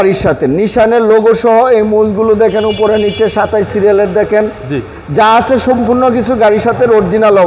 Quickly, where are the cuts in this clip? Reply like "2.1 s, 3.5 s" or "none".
none